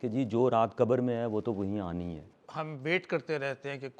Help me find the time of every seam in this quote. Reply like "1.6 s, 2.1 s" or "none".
2.4 s